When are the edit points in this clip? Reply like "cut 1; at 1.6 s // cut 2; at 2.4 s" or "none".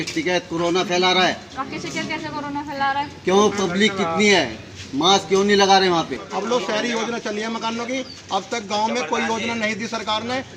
cut 1; at 6.1 s